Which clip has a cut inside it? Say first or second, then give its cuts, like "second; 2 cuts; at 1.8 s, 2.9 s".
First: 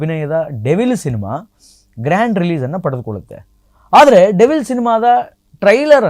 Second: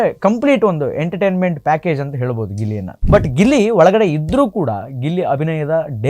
second; 1 cut; at 2.9 s